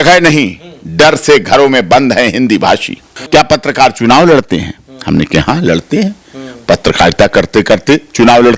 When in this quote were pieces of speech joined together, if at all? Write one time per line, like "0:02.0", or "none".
0:03.1